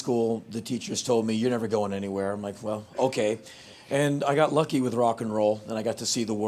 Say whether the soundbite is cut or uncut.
cut